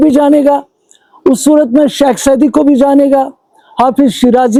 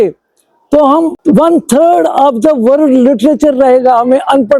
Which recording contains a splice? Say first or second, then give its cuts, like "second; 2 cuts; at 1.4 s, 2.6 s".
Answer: second; 1 cut; at 1.2 s